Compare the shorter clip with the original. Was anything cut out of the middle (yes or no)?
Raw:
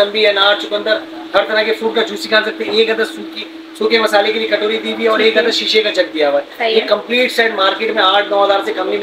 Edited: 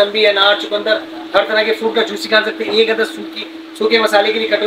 no